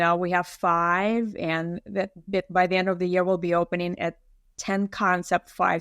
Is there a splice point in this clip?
no; 0 cuts

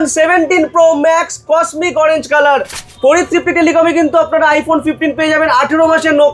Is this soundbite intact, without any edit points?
no; 1 cut; at 2.8 s

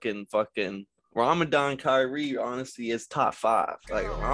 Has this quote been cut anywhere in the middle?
no; 0 cuts

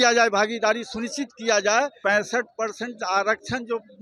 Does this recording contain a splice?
yes; 1 cut; at 2.0 s

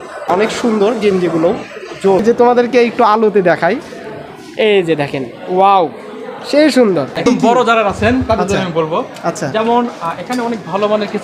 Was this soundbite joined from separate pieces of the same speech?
yes; 2 cuts; at 2.2 s, 7.2 s

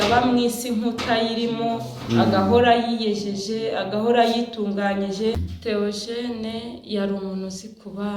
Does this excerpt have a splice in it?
yes; 1 cut; at 5.3 s

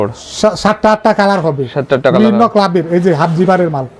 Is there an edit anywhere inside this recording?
no; 0 cuts

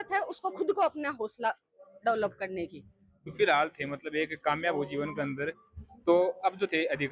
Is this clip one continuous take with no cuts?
yes; 0 cuts

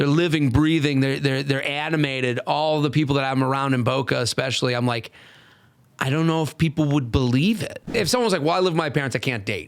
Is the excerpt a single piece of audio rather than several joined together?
no; 1 cut; at 7.9 s

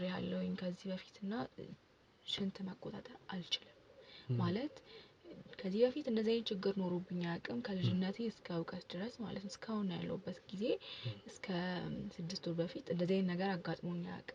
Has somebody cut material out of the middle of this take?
no; 0 cuts

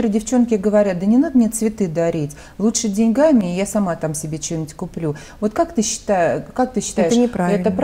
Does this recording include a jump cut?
no; 0 cuts

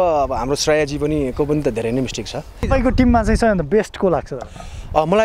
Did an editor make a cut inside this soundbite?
yes; 1 cut; at 2.7 s

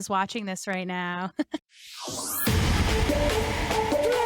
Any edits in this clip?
yes; 1 cut; at 1.6 s

